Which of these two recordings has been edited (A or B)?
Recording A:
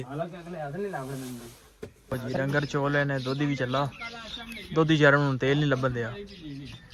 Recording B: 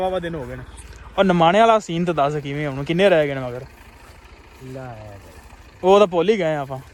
A